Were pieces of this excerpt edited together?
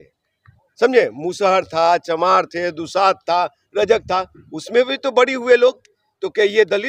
no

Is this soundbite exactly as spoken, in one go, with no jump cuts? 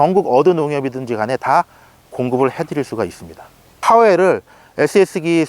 no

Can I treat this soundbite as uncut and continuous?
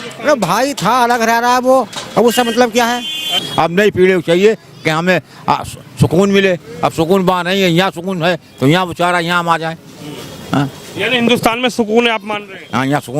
no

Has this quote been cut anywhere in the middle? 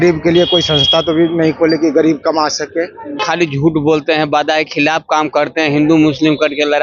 yes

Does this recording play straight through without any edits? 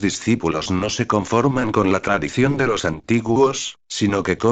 yes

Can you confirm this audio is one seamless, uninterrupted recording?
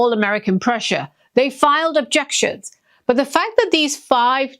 no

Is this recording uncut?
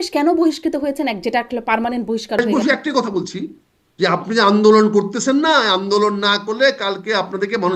no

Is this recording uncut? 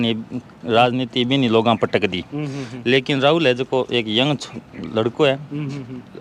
yes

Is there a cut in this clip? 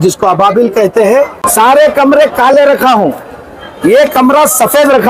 yes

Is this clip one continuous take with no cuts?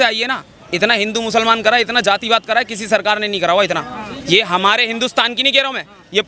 yes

